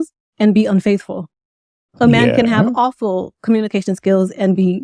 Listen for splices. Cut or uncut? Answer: uncut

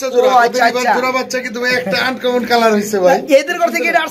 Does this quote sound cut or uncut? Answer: uncut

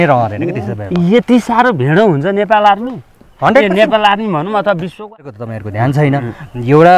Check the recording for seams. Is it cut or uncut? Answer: cut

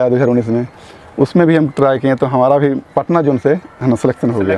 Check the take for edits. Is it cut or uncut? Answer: uncut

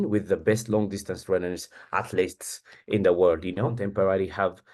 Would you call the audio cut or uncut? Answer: cut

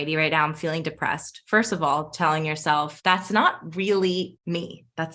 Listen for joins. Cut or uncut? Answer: cut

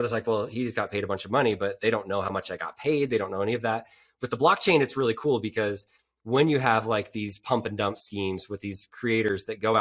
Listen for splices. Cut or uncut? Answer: uncut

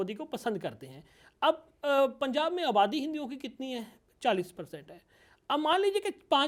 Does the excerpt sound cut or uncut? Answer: uncut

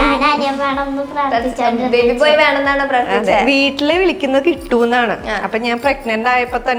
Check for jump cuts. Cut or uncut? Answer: uncut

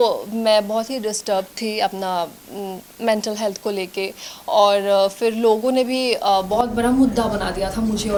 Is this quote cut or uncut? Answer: uncut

